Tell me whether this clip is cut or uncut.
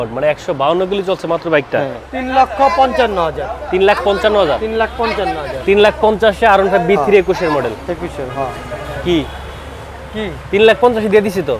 cut